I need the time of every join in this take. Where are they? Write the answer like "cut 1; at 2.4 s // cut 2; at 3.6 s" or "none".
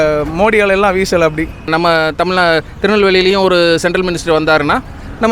cut 1; at 1.7 s